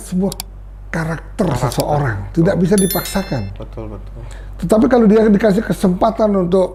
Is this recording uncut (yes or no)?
yes